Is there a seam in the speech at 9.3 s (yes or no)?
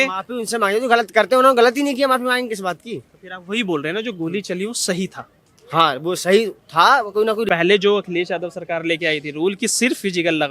no